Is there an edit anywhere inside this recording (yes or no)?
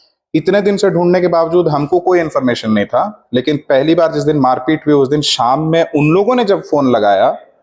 no